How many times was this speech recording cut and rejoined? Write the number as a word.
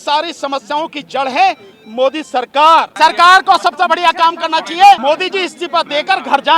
two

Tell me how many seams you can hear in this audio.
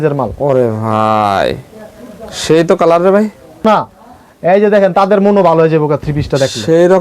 one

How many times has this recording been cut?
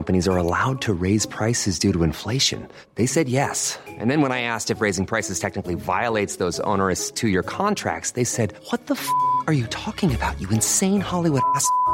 zero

